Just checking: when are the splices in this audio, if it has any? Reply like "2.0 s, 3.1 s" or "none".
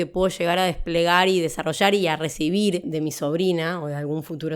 2.9 s